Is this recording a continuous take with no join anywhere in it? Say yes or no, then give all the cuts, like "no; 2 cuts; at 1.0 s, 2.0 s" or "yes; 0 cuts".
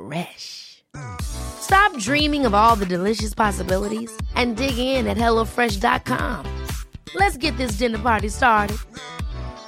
yes; 0 cuts